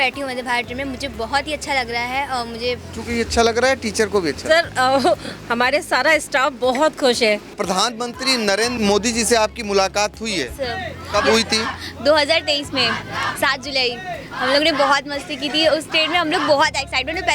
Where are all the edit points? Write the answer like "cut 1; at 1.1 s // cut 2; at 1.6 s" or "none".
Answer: cut 1; at 2.9 s // cut 2; at 7.6 s // cut 3; at 8.7 s